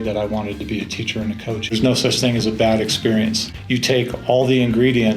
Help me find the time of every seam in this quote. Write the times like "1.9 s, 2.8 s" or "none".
1.7 s, 3.5 s